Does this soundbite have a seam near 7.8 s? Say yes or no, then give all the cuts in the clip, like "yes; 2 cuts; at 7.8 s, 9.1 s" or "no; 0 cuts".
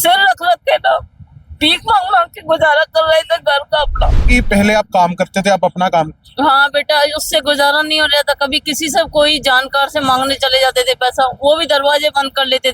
no; 1 cut; at 4.2 s